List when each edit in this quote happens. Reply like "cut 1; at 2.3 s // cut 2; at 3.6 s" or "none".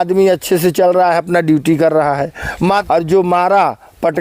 cut 1; at 2.8 s